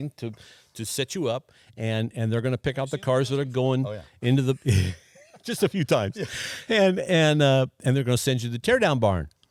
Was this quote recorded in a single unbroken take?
yes; 0 cuts

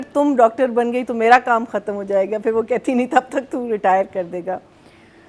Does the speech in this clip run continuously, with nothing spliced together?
yes; 0 cuts

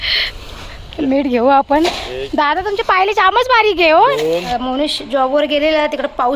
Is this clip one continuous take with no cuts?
no; 1 cut; at 4.5 s

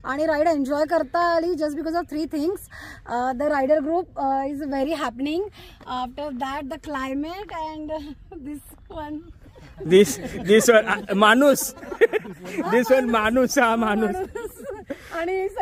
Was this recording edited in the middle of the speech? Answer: no; 0 cuts

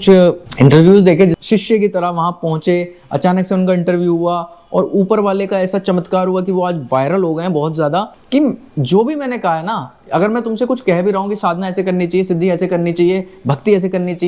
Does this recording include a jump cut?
yes; 2 cuts; at 1.3 s, 8.2 s

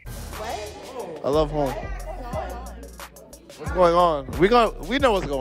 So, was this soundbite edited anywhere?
no; 0 cuts

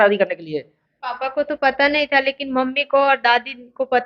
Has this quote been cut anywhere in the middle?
no; 0 cuts

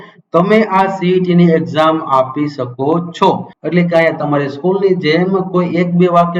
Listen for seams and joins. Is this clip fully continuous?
no; 1 cut; at 3.5 s

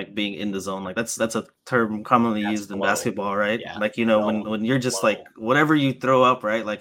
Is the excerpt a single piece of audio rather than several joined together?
yes; 0 cuts

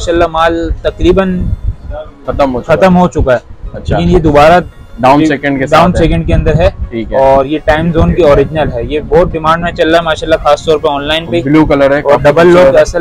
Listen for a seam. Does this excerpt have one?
no; 0 cuts

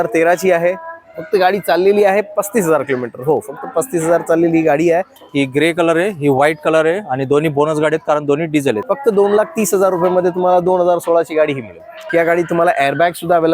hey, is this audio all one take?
no; 3 cuts; at 5.2 s, 8.8 s, 12.0 s

